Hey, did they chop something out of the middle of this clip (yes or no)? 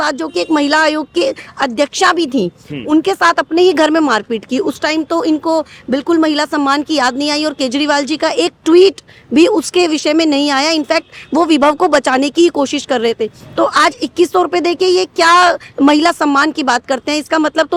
no